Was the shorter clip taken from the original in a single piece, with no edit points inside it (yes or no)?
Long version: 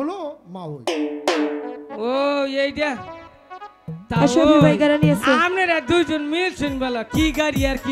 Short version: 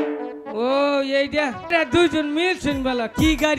no